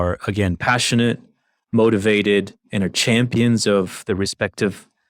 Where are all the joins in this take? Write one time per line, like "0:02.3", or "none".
none